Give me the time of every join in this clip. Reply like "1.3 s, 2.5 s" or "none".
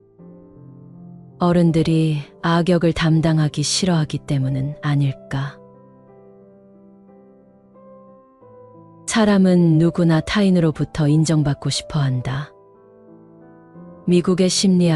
5.5 s, 9.1 s, 12.5 s, 14.0 s